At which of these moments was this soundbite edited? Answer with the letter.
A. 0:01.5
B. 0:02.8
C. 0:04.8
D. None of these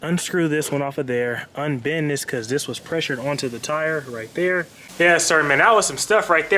C